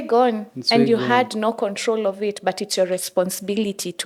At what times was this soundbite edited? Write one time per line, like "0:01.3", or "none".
none